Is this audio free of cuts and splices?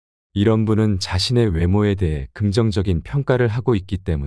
no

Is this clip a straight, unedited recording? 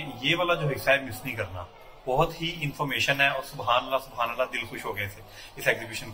yes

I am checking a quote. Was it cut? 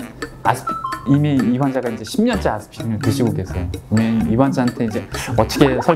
no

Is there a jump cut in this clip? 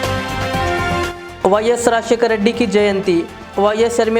yes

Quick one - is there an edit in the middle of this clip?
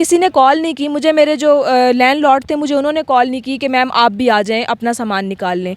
no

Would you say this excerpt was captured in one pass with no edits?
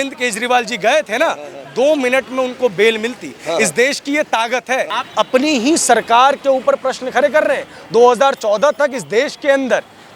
no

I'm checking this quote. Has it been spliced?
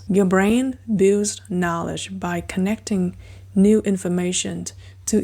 no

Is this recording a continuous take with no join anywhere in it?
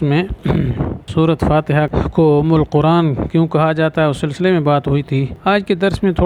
no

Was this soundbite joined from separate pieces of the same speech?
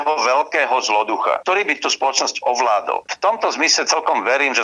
yes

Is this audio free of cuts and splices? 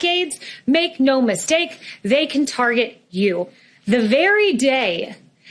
no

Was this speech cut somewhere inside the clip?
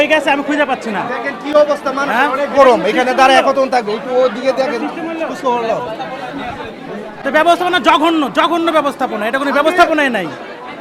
no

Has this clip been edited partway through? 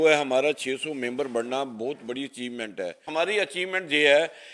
yes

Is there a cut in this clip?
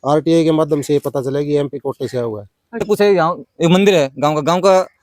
yes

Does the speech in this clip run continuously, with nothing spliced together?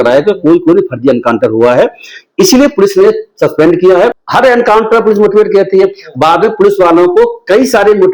no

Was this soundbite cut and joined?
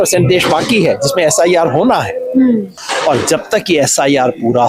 yes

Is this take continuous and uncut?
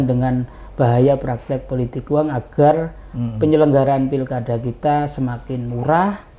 yes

